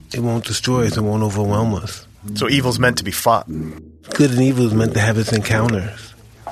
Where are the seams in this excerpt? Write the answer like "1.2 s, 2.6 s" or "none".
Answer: 2.3 s, 3.6 s